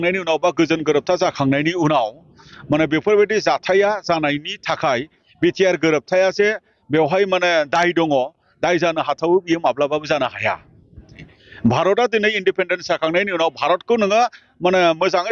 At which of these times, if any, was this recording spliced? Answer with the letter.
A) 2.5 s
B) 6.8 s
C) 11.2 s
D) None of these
C